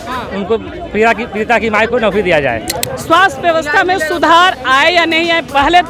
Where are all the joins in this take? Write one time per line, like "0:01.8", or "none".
0:02.7